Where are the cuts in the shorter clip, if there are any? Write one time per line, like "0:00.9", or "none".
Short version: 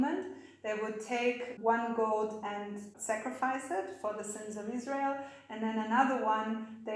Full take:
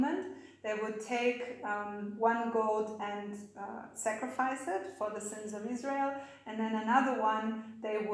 0:01.5
0:02.9